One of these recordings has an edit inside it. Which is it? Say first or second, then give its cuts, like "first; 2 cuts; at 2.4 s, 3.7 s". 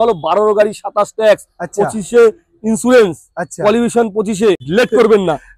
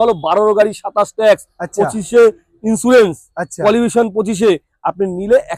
first; 1 cut; at 4.6 s